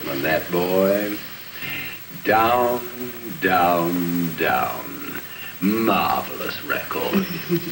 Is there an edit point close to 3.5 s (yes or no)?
yes